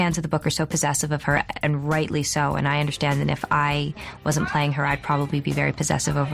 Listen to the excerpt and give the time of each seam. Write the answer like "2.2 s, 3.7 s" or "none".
none

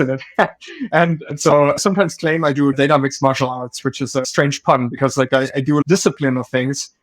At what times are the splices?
1.8 s, 2.7 s, 4.2 s

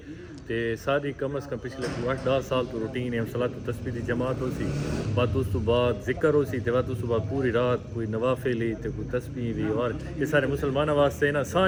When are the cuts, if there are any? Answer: none

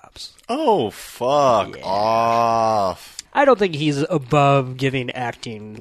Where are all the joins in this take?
3.2 s

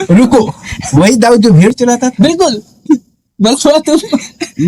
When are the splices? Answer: 3.2 s

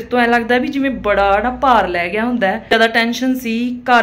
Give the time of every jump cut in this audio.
2.7 s

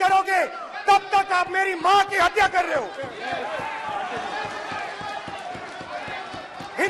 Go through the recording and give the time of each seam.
none

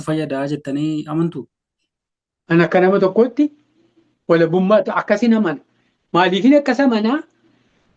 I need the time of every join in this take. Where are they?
none

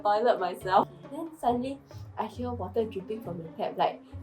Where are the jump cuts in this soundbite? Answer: 1.0 s

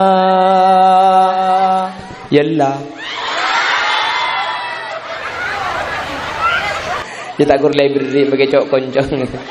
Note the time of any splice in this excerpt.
none

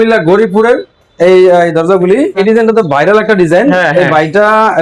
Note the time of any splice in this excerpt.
2.2 s

